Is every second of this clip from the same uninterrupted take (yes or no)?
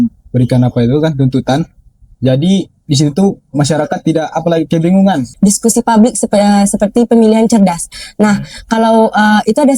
no